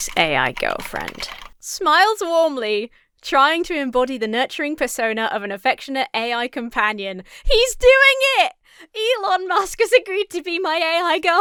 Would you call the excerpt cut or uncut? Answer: uncut